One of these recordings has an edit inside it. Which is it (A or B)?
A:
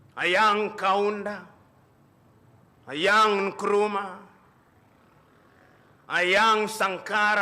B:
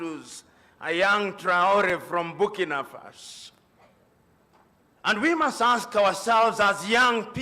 B